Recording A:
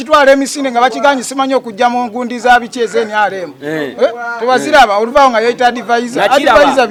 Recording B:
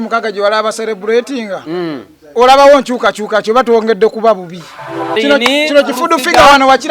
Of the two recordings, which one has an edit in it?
B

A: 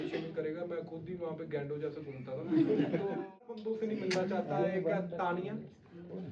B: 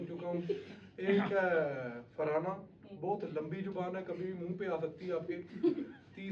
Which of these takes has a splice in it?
A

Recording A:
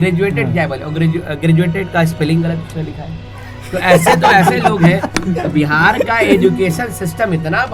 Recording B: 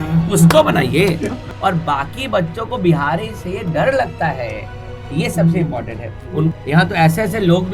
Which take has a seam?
B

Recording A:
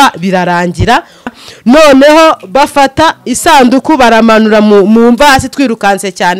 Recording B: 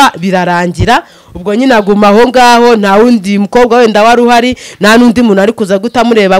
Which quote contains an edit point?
A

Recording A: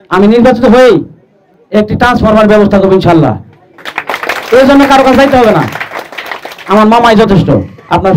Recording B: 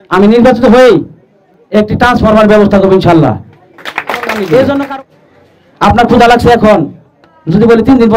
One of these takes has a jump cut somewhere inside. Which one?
B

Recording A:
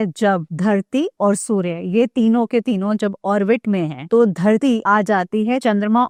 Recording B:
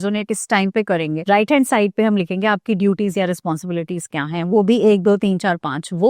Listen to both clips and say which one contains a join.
B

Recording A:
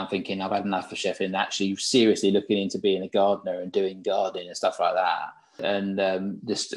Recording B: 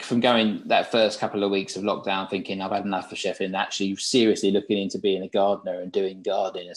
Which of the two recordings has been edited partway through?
A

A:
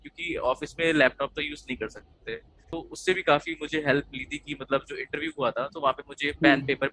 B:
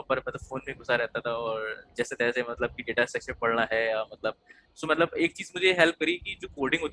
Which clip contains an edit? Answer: A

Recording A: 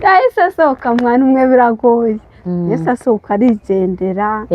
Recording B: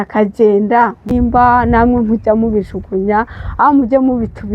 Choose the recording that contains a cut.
B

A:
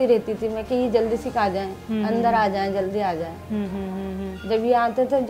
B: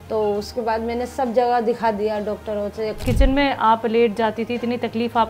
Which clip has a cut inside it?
B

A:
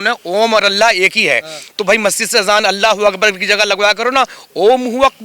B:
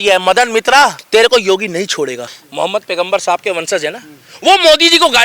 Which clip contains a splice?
B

